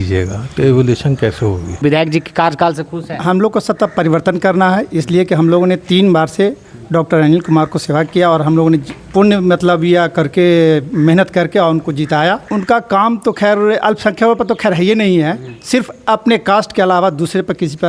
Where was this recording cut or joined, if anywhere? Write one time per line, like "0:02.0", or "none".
0:01.8
0:12.4

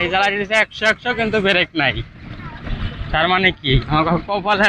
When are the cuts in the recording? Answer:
none

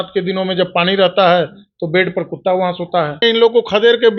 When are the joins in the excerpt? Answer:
0:03.2

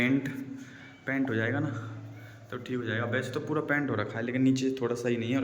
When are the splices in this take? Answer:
none

